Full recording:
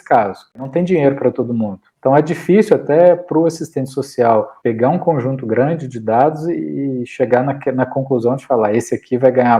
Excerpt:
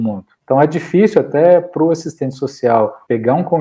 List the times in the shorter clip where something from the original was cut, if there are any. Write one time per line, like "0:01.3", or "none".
none